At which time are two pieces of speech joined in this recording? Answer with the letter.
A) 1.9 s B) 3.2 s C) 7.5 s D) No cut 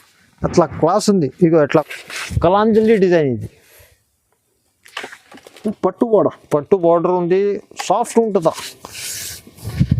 A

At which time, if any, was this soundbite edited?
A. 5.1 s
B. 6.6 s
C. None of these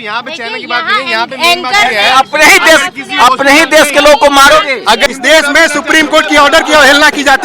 A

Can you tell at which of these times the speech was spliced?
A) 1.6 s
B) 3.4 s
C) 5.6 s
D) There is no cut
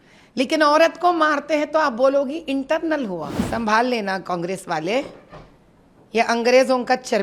B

